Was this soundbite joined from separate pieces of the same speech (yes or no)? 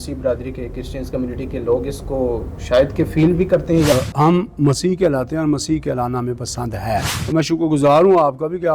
yes